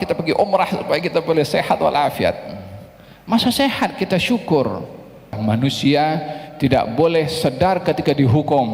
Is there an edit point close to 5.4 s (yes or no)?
yes